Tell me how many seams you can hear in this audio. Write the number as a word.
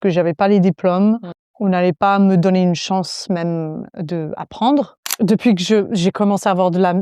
one